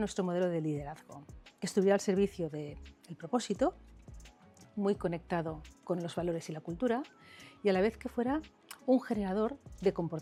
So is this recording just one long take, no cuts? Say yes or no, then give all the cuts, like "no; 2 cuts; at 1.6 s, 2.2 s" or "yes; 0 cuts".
yes; 0 cuts